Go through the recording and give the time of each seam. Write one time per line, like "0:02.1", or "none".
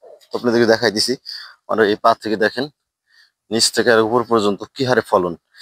none